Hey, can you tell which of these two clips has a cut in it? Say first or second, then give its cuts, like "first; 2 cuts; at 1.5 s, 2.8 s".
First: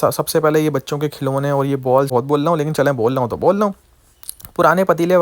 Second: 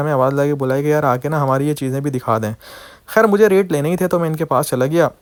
first; 1 cut; at 2.1 s